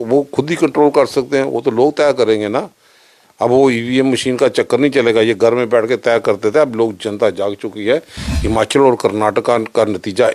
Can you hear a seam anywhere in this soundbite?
no; 0 cuts

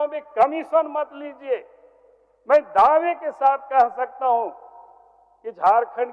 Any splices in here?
no; 0 cuts

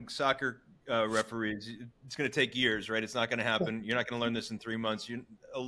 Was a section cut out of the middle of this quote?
no; 0 cuts

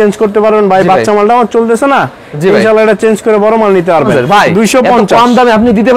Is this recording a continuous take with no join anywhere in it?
no; 1 cut; at 4.1 s

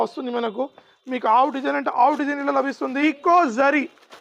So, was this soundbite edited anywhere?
yes; 1 cut; at 3.0 s

